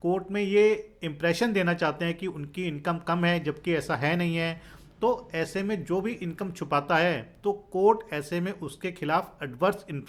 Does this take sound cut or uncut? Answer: uncut